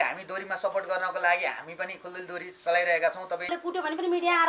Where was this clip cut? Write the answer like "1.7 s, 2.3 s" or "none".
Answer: 3.5 s